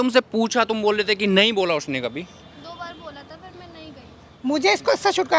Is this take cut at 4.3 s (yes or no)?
yes